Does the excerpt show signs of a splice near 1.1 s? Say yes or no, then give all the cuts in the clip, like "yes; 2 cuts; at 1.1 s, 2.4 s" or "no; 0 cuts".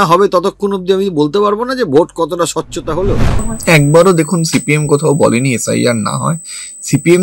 no; 1 cut; at 3.4 s